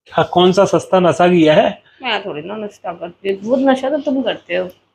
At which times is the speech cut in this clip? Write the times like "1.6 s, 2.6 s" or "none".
none